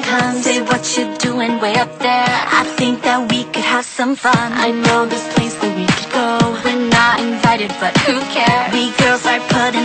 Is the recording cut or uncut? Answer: uncut